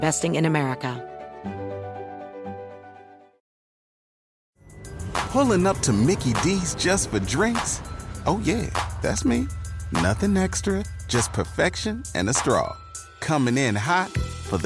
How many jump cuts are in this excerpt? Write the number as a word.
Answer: one